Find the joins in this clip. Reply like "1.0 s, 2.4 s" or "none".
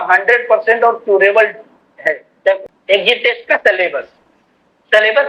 2.6 s